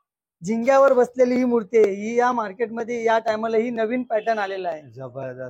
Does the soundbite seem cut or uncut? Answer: uncut